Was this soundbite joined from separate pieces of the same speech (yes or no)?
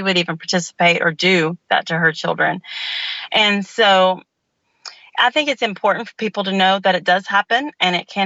no